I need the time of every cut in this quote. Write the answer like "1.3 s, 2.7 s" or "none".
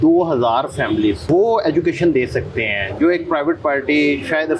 1.2 s